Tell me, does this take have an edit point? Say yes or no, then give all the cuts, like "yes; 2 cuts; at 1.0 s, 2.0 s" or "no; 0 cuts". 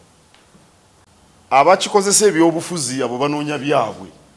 yes; 1 cut; at 1.1 s